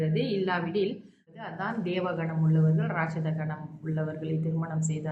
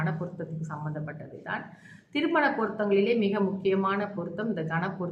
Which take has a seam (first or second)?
first